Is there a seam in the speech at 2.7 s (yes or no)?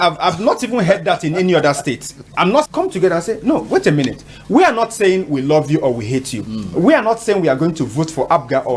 yes